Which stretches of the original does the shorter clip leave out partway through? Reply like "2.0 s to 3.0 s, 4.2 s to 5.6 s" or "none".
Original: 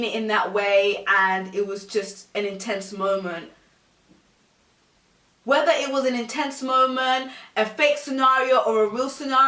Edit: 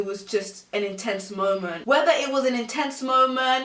3.4 s to 5.4 s